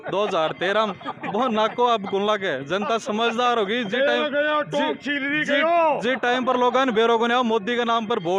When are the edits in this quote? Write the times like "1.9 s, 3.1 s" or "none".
none